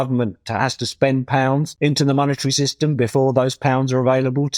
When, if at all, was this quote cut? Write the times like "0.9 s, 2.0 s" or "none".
1.7 s